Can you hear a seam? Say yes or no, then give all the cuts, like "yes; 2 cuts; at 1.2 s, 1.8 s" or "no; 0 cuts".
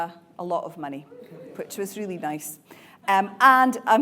no; 0 cuts